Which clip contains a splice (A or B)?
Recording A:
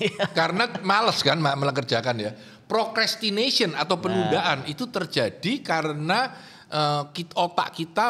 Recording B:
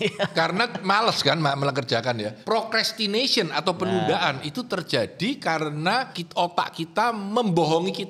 B